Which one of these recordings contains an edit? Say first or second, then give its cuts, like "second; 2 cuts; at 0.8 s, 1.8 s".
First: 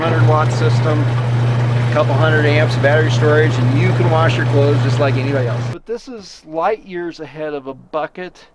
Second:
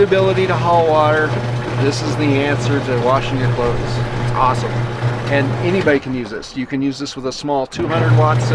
first; 1 cut; at 5.7 s